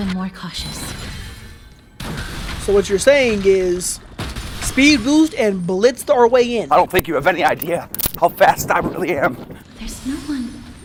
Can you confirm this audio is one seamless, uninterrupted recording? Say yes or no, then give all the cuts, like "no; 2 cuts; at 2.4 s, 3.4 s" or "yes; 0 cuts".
yes; 0 cuts